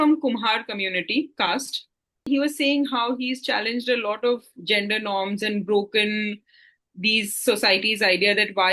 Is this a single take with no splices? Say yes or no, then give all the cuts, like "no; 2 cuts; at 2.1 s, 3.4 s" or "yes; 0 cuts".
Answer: no; 1 cut; at 2.3 s